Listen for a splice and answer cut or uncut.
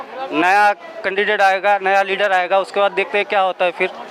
uncut